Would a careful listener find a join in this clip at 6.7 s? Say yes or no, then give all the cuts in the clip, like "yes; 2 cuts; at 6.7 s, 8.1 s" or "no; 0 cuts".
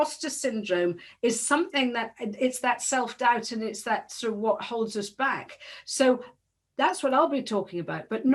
no; 0 cuts